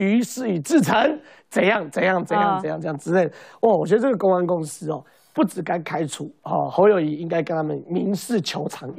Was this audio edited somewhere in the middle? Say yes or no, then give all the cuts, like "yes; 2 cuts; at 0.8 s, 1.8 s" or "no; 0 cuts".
no; 0 cuts